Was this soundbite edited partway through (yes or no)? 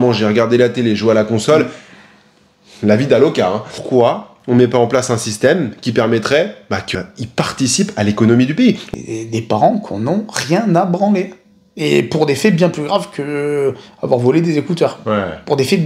yes